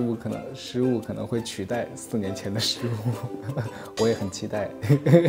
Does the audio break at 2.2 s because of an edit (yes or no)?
no